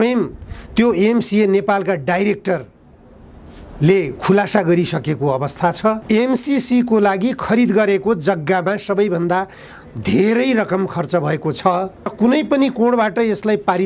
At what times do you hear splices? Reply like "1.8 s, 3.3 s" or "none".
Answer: 6.0 s, 12.1 s